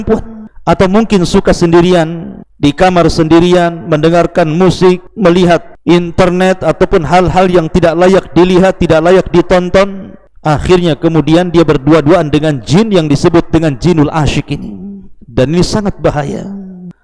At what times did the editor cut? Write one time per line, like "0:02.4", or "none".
none